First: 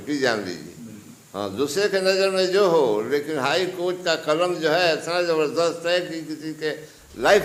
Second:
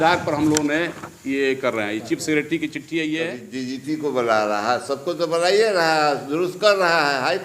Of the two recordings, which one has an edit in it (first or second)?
second